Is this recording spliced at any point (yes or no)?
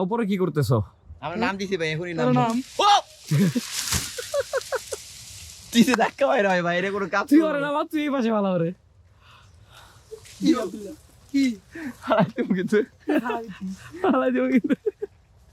no